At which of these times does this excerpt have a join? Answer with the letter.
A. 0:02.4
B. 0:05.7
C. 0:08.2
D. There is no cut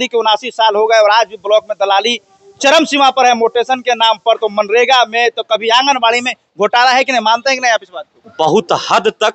C